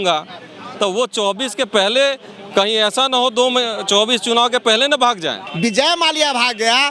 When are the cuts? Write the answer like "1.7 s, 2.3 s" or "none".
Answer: 5.4 s